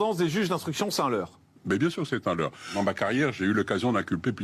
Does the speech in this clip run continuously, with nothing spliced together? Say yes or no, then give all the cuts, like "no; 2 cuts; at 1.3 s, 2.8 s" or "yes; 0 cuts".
no; 1 cut; at 2.7 s